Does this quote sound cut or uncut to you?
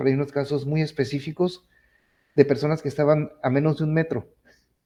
uncut